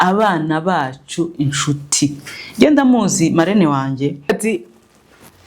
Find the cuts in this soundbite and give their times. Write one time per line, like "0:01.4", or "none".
0:04.3